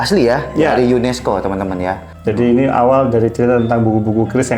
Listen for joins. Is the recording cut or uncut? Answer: cut